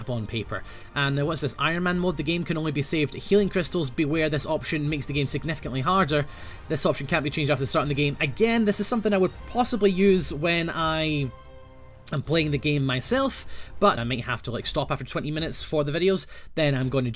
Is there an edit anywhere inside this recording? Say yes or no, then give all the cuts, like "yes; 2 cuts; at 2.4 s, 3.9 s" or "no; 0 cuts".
yes; 1 cut; at 1.6 s